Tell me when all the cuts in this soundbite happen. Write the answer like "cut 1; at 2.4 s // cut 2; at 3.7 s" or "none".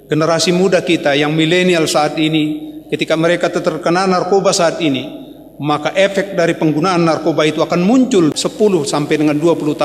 cut 1; at 8.3 s